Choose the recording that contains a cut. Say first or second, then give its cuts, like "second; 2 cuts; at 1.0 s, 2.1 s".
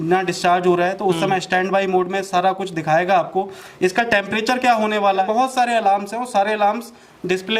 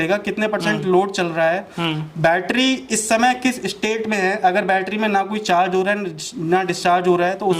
first; 1 cut; at 5.2 s